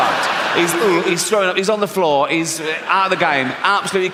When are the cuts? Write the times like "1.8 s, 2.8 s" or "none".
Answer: none

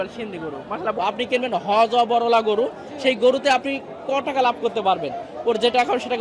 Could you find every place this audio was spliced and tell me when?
1.0 s

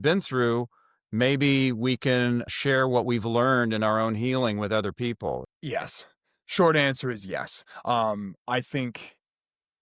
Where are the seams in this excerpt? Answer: 2.5 s, 5.5 s

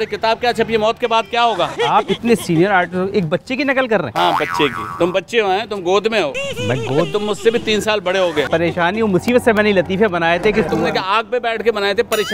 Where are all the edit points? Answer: 1.7 s, 8.5 s, 10.7 s

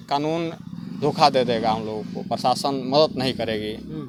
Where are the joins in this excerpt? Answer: none

